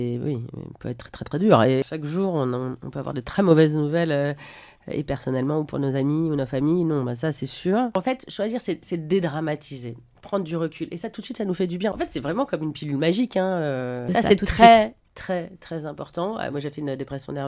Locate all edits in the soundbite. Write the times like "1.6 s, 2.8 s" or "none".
1.8 s, 7.9 s, 11.9 s, 14.0 s